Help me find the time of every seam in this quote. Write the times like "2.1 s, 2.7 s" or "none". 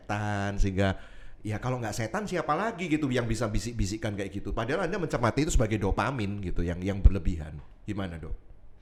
none